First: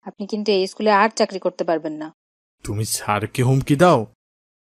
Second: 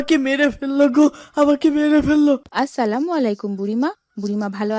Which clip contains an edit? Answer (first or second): second